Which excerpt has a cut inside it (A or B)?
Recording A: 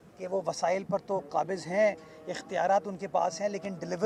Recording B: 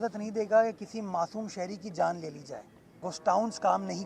B